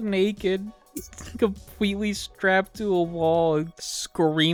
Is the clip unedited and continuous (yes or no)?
yes